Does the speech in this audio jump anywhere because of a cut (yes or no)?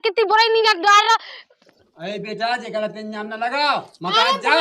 yes